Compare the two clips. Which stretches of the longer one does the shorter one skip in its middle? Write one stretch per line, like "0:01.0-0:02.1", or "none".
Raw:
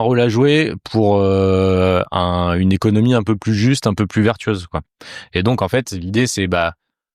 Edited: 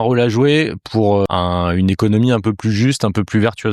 0:01.3-0:02.1